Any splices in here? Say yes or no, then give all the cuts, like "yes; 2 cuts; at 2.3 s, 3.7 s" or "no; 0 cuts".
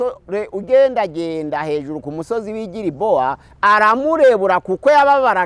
yes; 1 cut; at 3.5 s